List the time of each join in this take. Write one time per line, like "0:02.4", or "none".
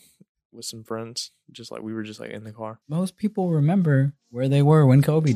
0:02.8